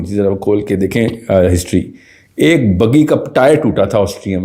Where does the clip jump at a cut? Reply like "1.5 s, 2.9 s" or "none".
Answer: none